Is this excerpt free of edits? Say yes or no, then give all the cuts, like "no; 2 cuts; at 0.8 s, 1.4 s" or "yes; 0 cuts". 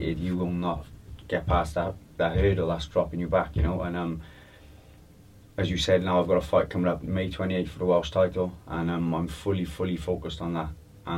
yes; 0 cuts